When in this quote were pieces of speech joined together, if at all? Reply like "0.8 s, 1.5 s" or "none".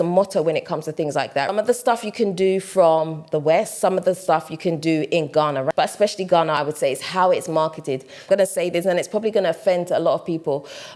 1.5 s, 5.7 s, 8.2 s